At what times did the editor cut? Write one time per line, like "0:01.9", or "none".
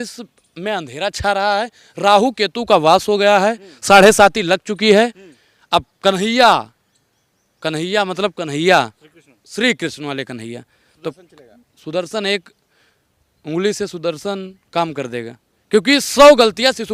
none